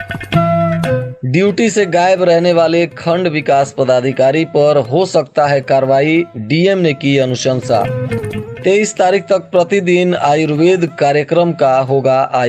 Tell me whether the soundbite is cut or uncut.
cut